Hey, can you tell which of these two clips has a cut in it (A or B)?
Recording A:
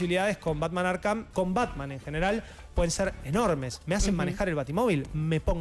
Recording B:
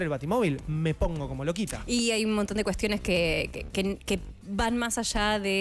A